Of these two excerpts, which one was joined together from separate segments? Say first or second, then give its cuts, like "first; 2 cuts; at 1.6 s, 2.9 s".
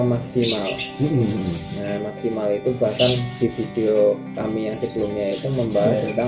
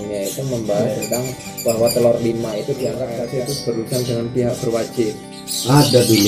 second; 1 cut; at 3.1 s